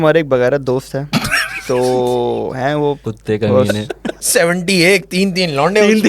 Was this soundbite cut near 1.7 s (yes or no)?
no